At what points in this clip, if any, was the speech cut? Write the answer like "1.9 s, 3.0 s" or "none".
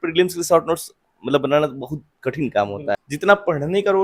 3.0 s

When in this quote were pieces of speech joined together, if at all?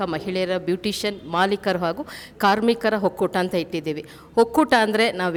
none

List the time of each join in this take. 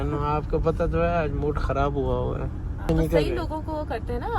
2.9 s

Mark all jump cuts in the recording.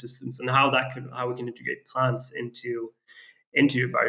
none

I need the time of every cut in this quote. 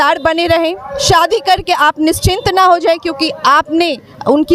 none

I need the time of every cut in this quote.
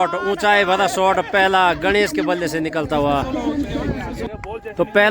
4.1 s

